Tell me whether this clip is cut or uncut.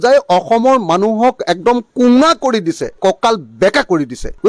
cut